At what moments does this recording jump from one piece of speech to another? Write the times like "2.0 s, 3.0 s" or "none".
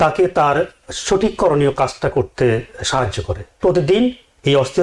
3.4 s